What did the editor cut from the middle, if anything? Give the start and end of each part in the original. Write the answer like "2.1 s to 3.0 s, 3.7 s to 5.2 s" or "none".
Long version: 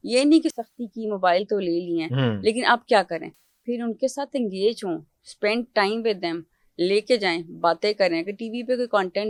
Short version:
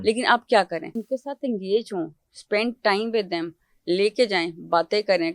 3.4 s to 3.9 s